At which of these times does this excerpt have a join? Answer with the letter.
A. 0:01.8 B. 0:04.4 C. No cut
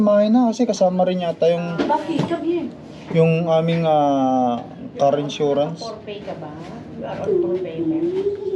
C